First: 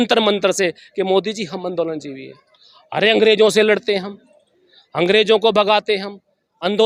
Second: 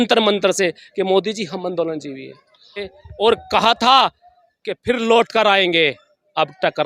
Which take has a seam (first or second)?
second